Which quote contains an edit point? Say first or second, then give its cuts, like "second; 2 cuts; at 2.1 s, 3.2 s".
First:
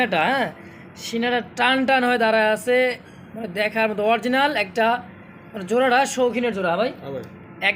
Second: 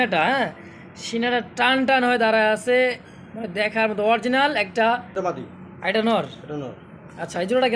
second; 1 cut; at 5.1 s